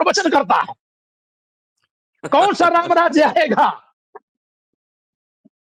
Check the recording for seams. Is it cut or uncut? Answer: uncut